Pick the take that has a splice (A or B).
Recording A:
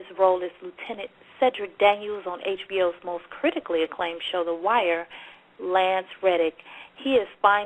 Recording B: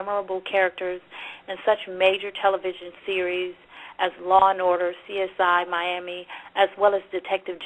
B